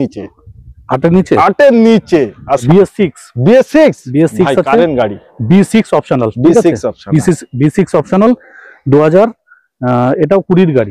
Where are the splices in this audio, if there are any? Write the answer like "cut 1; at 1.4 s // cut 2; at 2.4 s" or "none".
cut 1; at 2.6 s